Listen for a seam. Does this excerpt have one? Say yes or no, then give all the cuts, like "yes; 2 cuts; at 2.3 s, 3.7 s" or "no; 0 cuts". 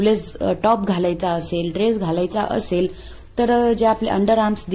no; 0 cuts